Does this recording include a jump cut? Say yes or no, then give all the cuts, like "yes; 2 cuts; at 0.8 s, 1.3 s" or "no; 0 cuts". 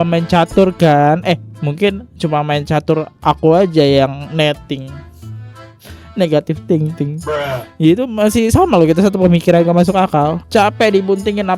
no; 0 cuts